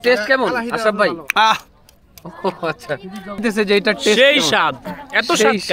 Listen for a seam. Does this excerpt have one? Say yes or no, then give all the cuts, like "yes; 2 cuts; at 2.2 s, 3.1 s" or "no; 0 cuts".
yes; 1 cut; at 3.4 s